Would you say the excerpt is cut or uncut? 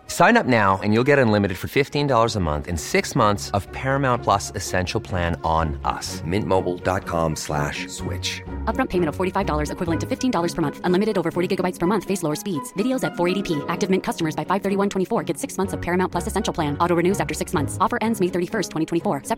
uncut